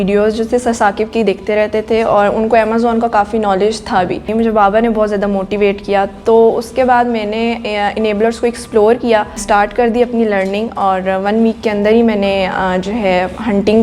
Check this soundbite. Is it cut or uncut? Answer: cut